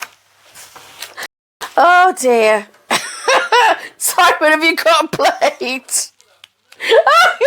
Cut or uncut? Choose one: uncut